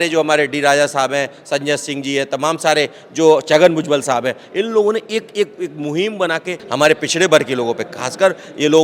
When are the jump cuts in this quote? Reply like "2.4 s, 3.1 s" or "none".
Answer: 6.6 s